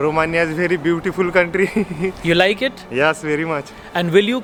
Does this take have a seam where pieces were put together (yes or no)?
no